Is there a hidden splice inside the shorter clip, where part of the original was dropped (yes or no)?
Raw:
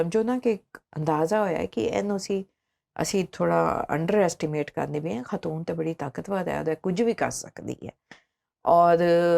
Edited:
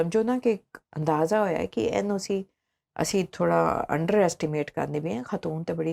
no